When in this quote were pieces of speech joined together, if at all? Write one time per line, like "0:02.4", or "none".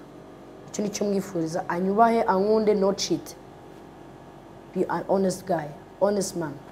none